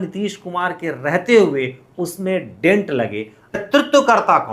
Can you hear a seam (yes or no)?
yes